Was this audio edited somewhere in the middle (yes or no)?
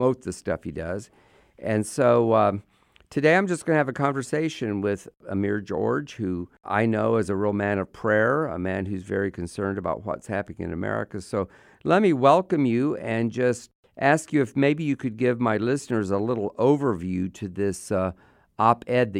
yes